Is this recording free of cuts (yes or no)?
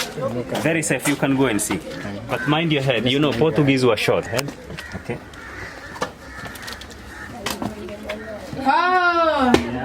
yes